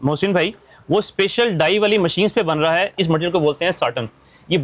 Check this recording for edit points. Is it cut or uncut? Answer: cut